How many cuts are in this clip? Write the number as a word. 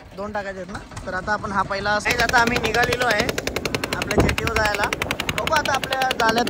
one